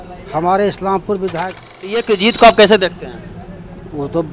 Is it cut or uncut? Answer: cut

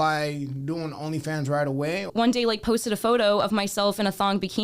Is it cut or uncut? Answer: cut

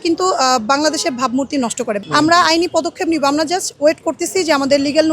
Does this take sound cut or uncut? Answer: cut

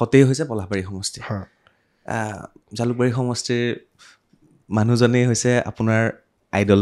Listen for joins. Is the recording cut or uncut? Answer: uncut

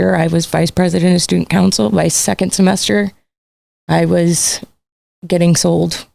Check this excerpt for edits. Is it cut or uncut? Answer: uncut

